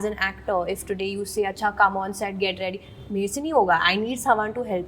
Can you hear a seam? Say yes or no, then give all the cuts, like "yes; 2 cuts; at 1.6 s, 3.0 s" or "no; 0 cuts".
no; 0 cuts